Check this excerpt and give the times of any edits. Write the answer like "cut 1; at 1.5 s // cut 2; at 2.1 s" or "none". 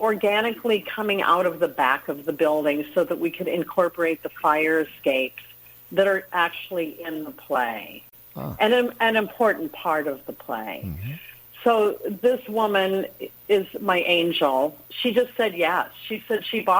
none